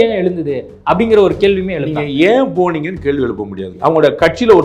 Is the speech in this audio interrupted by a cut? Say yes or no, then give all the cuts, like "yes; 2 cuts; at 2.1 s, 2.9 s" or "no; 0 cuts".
yes; 1 cut; at 3.7 s